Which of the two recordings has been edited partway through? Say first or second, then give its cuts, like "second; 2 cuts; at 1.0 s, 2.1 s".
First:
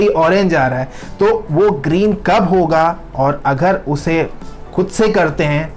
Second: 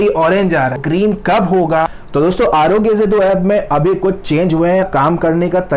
second; 3 cuts; at 0.8 s, 2.0 s, 4.9 s